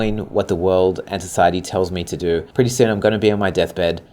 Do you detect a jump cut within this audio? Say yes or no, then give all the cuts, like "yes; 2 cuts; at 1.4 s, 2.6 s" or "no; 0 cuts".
yes; 1 cut; at 2.5 s